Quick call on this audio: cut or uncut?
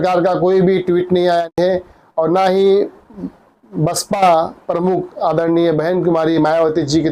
cut